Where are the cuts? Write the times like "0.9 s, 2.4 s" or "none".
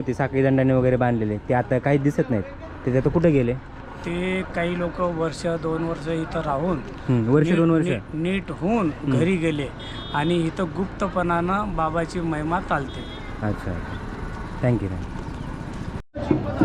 none